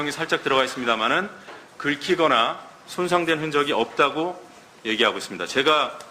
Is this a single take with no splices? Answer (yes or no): no